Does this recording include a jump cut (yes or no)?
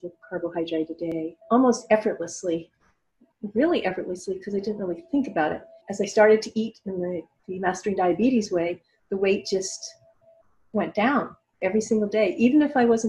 yes